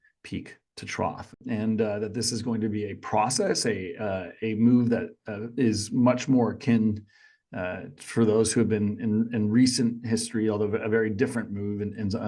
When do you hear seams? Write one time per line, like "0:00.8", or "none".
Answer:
0:01.4